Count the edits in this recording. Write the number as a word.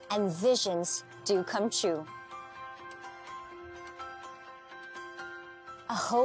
two